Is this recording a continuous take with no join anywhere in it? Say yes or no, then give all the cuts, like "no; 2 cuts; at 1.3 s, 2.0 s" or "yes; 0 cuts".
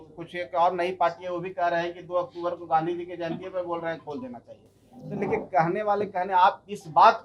yes; 0 cuts